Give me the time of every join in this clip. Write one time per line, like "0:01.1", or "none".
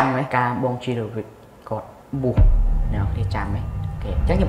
none